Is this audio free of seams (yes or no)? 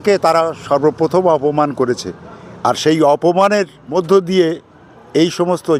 no